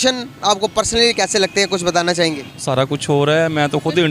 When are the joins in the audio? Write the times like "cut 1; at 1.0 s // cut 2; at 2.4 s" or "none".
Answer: cut 1; at 2.7 s